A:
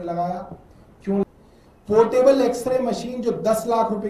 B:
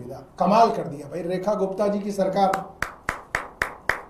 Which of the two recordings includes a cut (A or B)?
A